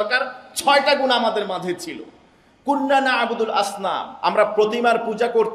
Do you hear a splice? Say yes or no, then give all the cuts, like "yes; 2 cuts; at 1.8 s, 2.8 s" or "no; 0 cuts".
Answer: no; 0 cuts